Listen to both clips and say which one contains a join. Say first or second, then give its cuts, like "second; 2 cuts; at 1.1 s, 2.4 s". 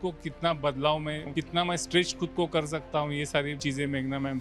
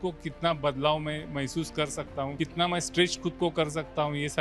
first; 2 cuts; at 1.3 s, 3.5 s